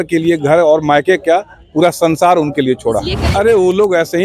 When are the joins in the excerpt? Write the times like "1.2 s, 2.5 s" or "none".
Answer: 3.2 s